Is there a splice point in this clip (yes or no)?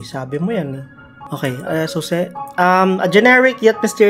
yes